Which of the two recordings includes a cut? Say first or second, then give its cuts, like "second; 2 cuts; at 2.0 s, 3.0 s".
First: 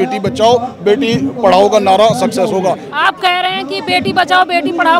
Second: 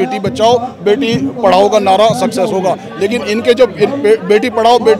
first; 1 cut; at 2.9 s